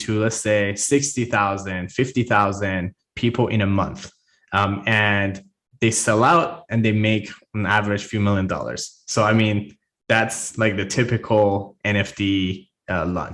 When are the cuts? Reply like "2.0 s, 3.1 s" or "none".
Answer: none